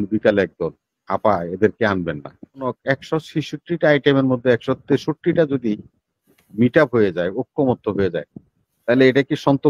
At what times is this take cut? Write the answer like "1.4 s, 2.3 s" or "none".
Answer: 2.8 s